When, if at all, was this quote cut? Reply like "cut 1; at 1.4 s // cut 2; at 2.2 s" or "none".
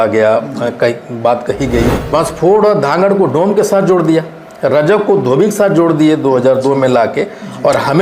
cut 1; at 2.0 s